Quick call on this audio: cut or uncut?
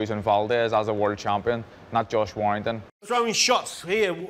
cut